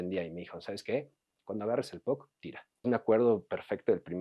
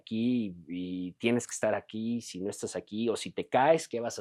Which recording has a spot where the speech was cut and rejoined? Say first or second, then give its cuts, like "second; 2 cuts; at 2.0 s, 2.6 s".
first; 1 cut; at 2.8 s